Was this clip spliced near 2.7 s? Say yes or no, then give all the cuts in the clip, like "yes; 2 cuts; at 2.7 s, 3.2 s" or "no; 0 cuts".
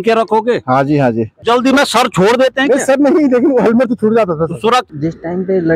no; 2 cuts; at 1.3 s, 4.9 s